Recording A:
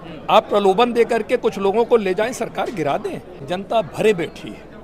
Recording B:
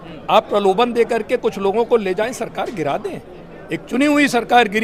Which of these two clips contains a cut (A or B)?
A